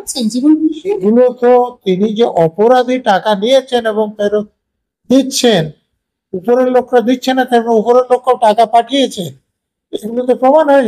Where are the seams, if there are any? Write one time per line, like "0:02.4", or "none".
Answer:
0:01.0